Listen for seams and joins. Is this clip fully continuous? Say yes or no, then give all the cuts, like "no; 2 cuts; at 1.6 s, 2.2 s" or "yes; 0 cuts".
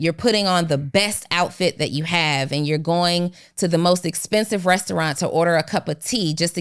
yes; 0 cuts